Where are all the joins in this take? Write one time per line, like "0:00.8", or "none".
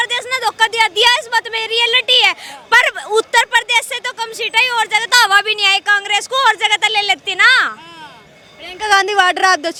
none